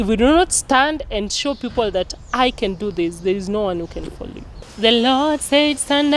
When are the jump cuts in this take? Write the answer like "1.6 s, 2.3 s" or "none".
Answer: 4.6 s